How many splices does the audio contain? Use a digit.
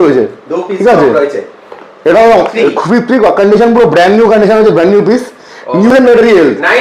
1